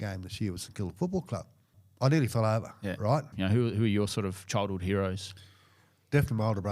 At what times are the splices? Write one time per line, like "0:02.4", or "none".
0:01.8
0:03.3